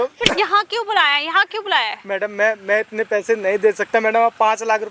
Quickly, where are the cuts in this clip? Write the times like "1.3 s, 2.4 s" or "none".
none